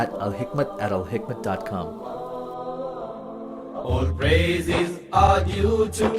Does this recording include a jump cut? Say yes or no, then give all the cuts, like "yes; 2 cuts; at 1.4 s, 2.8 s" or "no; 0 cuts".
yes; 1 cut; at 3.8 s